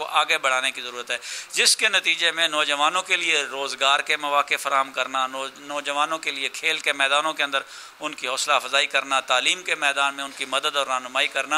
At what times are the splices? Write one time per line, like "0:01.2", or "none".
none